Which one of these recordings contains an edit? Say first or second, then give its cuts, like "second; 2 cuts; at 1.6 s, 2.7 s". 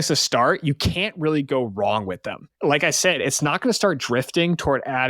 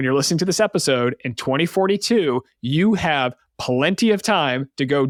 first; 1 cut; at 2.4 s